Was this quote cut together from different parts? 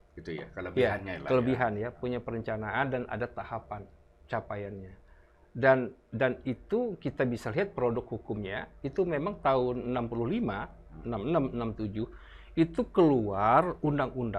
no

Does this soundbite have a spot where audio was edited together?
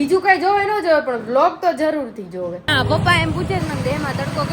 yes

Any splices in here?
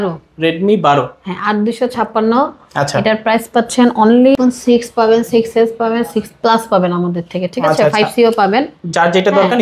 yes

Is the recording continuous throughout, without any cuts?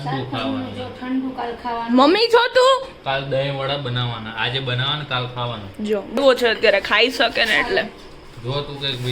no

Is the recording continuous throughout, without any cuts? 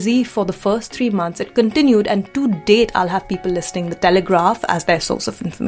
yes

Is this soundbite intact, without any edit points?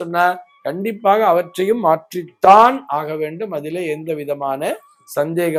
yes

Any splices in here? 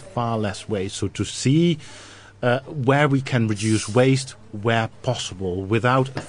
yes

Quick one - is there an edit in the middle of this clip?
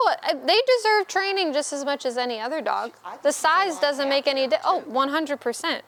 no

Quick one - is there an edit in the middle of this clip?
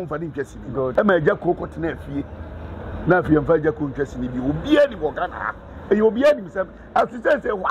yes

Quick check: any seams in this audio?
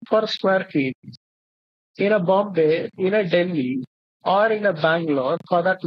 no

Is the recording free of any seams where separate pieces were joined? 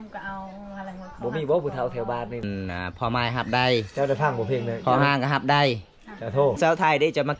no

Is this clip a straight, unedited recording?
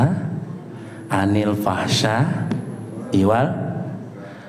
yes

